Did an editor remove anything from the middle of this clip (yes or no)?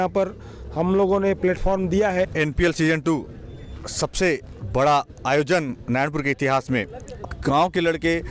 yes